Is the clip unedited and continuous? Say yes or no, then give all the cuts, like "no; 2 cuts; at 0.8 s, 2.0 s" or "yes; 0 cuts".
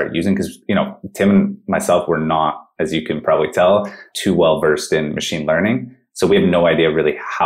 yes; 0 cuts